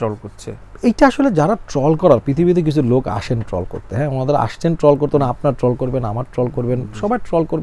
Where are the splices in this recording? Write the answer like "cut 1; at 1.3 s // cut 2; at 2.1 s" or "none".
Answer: none